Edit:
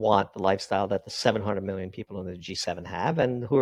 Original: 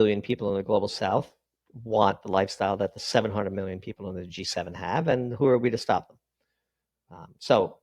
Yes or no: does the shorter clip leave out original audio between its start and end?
no